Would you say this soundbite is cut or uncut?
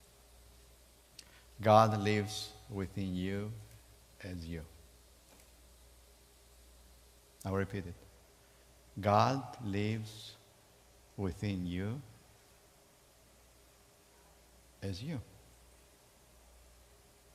uncut